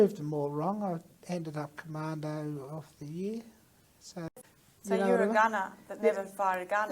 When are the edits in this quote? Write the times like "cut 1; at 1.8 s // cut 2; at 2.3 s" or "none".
cut 1; at 4.2 s